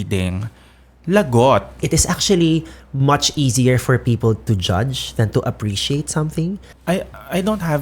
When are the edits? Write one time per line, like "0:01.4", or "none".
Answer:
0:01.8
0:06.7

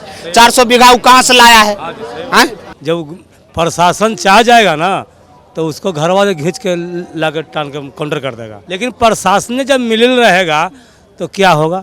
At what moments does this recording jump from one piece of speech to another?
0:02.7
0:08.6

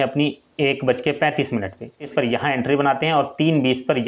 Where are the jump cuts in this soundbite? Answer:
0:02.1

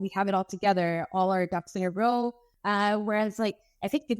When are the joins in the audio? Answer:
0:02.5

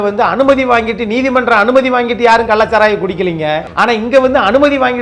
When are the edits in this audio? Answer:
0:03.7

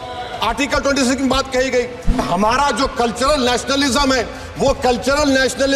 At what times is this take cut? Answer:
0:02.2

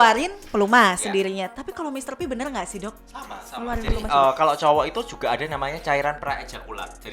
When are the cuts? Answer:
none

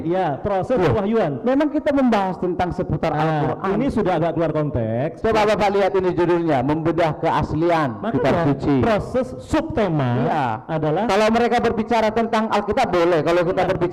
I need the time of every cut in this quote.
none

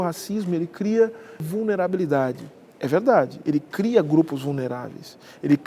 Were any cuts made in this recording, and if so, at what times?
0:01.4

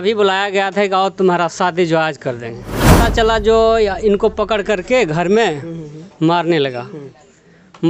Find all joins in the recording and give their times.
0:02.9

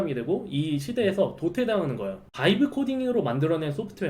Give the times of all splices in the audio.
0:02.2

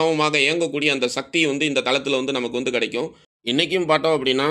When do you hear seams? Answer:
0:03.3

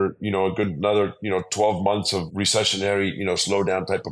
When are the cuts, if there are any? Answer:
0:02.2

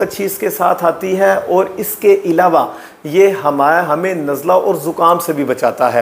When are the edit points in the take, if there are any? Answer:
none

